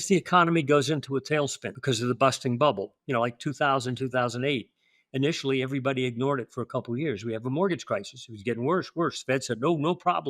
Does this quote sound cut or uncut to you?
cut